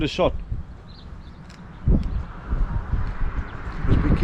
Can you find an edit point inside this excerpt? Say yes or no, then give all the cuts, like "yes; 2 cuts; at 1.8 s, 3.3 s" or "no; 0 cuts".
no; 0 cuts